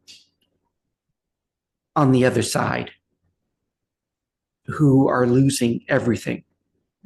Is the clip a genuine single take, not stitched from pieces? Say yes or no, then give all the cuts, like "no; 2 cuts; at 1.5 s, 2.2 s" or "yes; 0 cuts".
yes; 0 cuts